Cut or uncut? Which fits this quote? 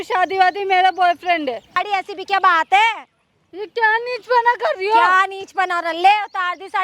cut